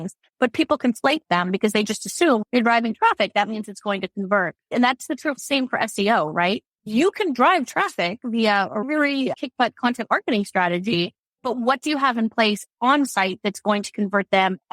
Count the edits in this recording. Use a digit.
1